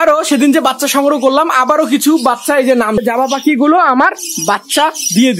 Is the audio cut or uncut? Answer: cut